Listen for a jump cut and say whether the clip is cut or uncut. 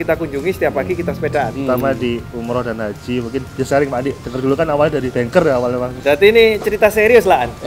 cut